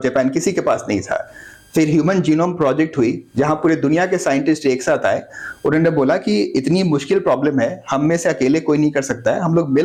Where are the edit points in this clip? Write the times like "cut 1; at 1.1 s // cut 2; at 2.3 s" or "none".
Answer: none